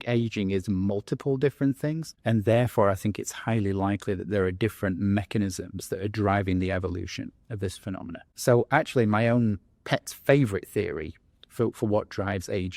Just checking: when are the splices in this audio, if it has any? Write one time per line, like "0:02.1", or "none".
0:02.1
0:08.3

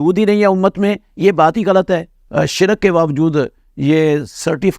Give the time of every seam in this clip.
0:02.2

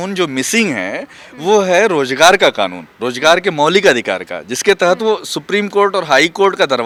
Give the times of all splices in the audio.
none

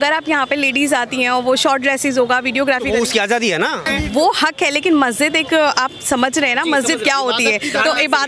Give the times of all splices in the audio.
0:03.9

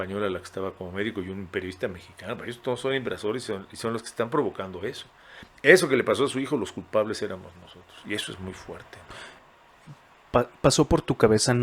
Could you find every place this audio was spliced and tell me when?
none

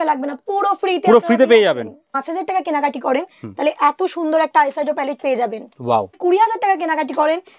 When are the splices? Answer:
0:02.0
0:06.2

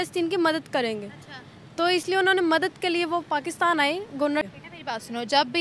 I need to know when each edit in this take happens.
0:04.5

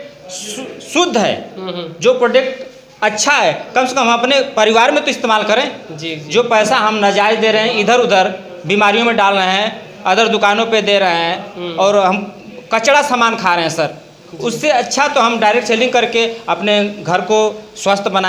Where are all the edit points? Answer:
none

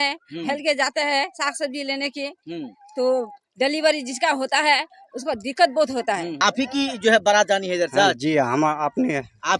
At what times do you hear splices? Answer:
0:06.3

